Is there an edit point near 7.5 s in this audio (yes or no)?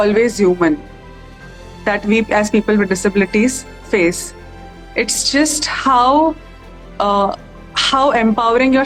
no